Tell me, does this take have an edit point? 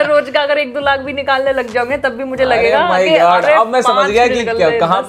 no; 0 cuts

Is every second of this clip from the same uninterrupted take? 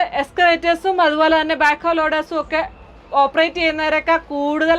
yes; 0 cuts

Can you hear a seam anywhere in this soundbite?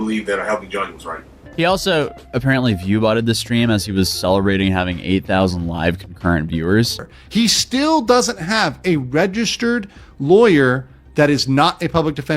yes; 2 cuts; at 1.4 s, 7.1 s

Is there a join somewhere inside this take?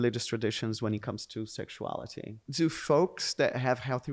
yes; 1 cut; at 2.4 s

